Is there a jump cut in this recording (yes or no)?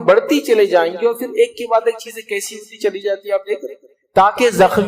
yes